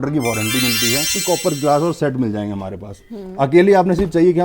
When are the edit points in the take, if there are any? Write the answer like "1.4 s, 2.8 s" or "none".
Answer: 1.2 s